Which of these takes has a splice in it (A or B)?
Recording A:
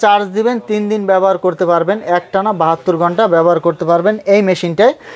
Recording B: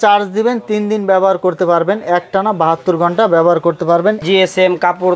B